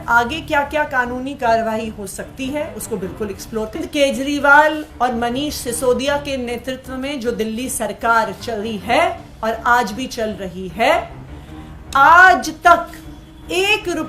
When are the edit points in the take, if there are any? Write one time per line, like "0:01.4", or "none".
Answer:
0:03.8